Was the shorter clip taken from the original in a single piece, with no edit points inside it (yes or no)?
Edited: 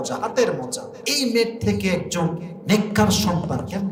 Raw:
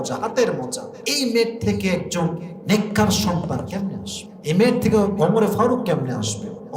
yes